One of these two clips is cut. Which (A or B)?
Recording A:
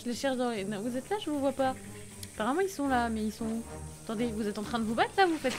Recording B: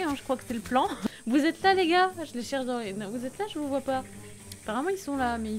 B